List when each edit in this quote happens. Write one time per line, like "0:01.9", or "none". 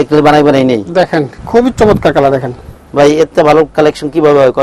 0:01.4